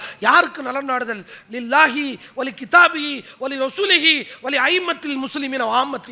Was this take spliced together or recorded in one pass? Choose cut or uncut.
uncut